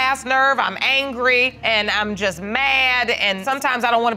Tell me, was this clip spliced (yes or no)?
yes